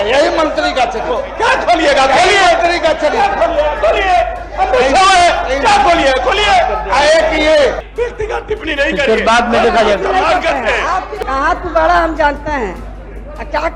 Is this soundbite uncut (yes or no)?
no